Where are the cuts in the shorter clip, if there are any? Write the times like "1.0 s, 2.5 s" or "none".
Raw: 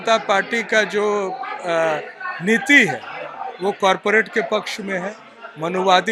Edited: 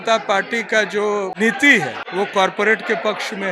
1.6 s